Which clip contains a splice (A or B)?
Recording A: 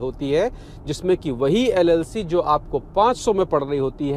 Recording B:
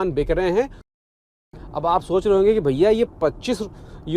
B